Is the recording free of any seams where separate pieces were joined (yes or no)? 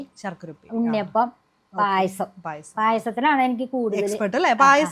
yes